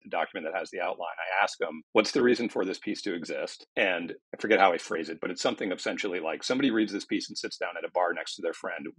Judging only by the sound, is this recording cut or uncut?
cut